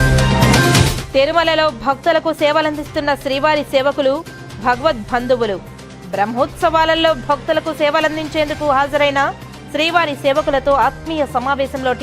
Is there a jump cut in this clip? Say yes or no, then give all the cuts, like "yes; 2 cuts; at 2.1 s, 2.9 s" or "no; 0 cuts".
yes; 1 cut; at 1.0 s